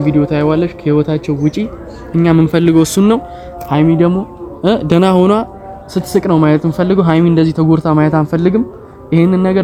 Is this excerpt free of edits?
yes; 0 cuts

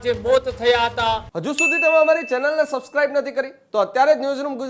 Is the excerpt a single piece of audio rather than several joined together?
no; 1 cut; at 1.4 s

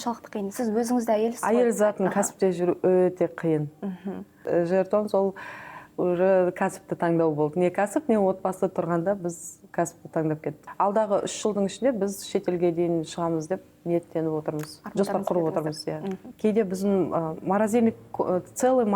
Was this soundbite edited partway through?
yes; 3 cuts; at 4.4 s, 10.7 s, 16.2 s

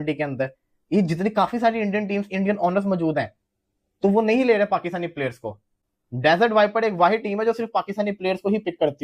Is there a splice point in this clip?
no; 0 cuts

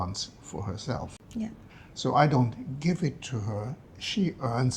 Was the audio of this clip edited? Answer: yes; 1 cut; at 1.2 s

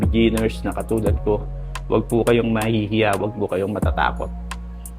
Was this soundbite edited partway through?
no; 0 cuts

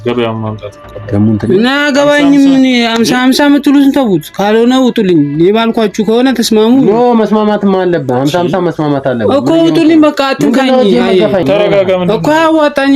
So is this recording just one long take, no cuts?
no; 1 cut; at 11.3 s

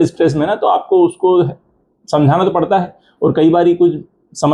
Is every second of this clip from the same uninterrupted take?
yes; 0 cuts

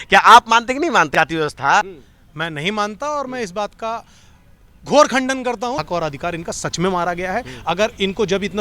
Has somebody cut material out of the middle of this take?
yes; 3 cuts; at 1.1 s, 2.0 s, 5.8 s

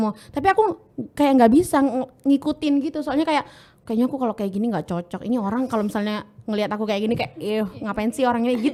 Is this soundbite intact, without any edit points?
yes; 0 cuts

